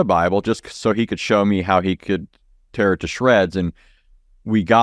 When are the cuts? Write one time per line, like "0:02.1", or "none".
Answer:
none